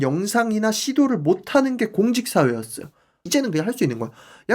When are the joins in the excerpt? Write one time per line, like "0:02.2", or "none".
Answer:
0:03.2